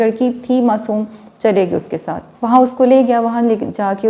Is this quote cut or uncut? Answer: uncut